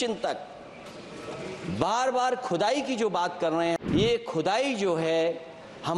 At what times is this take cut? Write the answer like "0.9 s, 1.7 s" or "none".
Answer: 3.8 s